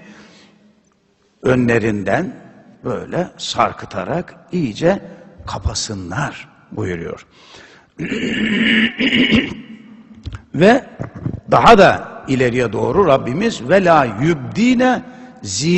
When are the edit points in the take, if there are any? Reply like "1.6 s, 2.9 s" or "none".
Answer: 3.0 s

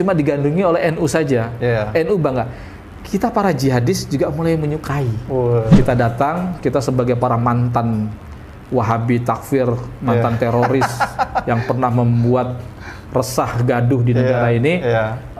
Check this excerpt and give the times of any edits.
5.7 s

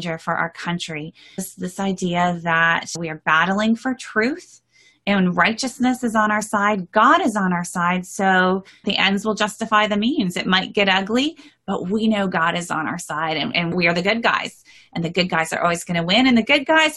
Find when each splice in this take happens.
1.5 s, 3.0 s, 8.8 s, 13.7 s

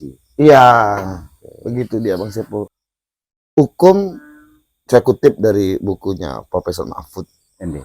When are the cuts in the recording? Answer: 2.7 s

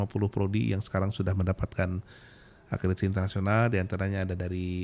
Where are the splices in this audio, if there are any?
none

